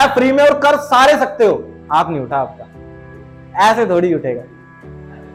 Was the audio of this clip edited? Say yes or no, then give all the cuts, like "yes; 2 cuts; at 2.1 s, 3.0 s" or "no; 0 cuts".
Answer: no; 0 cuts